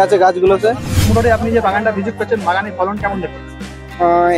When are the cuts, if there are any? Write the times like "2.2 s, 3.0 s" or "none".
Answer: 0.9 s